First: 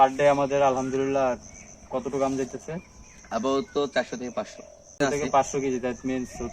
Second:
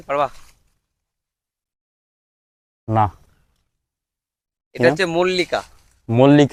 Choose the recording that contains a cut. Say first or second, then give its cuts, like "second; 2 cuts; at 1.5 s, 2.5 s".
first; 1 cut; at 5.0 s